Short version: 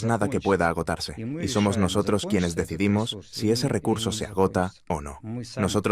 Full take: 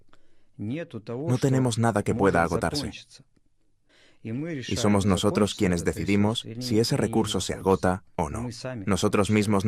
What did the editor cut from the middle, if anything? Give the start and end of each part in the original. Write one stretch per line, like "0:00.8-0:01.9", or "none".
0:03.1-0:04.6